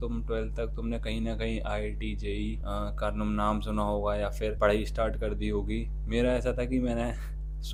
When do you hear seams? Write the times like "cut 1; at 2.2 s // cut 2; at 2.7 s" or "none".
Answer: none